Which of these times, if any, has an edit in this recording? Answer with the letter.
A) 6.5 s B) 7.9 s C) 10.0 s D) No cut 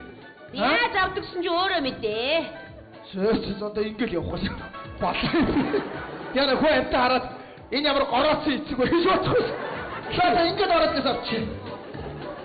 D